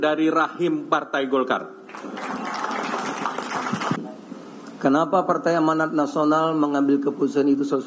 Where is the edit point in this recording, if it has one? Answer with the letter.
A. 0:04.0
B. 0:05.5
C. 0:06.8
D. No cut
A